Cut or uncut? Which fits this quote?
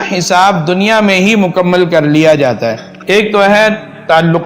cut